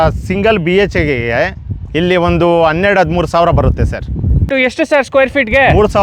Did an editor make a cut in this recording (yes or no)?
yes